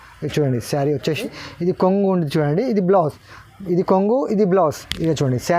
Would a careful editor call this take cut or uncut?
cut